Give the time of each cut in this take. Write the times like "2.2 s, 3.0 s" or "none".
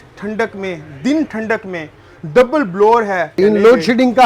3.3 s